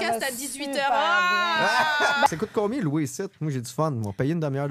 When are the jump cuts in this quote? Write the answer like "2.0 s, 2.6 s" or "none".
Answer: 2.3 s